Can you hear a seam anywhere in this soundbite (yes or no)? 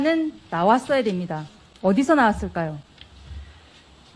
no